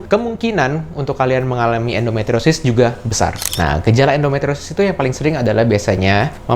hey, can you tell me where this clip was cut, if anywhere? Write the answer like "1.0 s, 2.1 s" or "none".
3.4 s